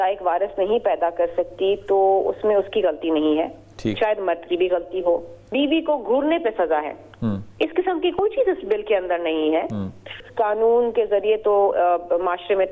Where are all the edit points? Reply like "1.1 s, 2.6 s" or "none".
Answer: 5.4 s, 10.2 s

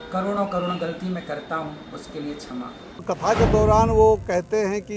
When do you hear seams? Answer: 3.0 s

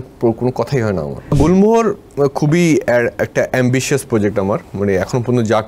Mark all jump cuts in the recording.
1.3 s, 4.7 s

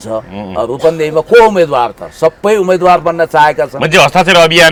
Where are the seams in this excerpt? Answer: none

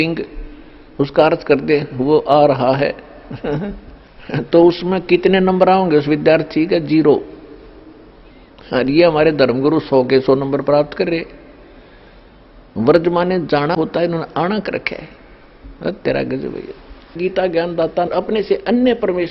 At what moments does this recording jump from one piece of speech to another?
17.2 s, 18.1 s

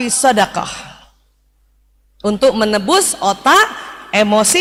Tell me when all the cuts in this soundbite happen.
none

